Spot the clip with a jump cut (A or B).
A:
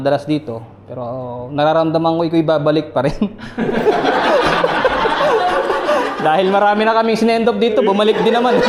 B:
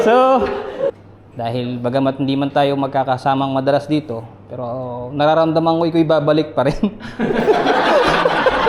B